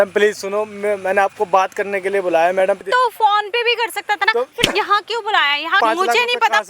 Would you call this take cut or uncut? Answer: cut